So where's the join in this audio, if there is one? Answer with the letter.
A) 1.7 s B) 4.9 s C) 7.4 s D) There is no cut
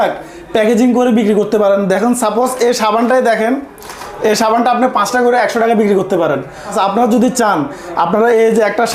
D